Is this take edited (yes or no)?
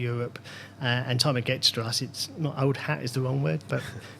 no